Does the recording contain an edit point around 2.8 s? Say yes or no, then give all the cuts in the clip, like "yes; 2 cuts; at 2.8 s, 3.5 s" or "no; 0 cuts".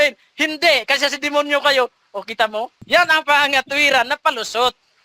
yes; 1 cut; at 2.8 s